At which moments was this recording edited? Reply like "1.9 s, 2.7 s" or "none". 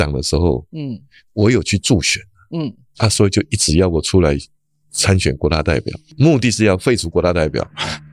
2.8 s

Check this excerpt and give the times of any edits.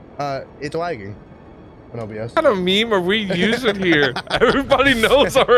2.4 s

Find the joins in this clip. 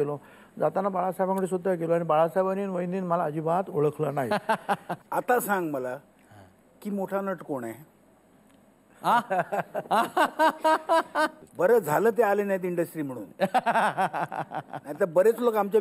4.9 s, 11.4 s

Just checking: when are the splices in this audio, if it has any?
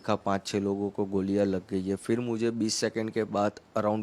none

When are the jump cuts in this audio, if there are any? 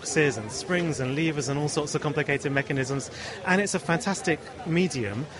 none

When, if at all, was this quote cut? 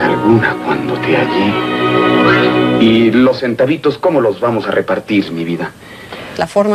2.2 s

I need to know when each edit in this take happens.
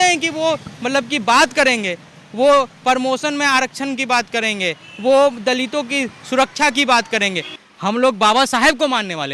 7.5 s

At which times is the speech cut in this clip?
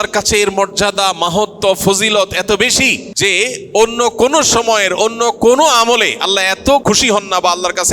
3.1 s, 6.8 s

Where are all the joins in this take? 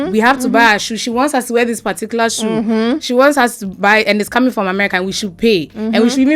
none

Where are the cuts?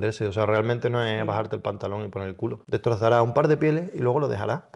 2.6 s

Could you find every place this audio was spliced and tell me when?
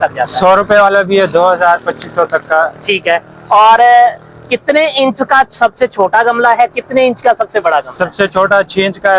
none

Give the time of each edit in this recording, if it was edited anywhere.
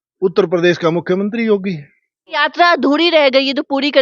2.4 s

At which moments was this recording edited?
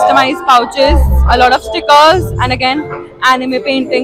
none

